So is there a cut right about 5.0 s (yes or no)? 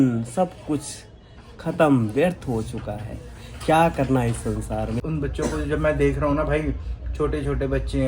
yes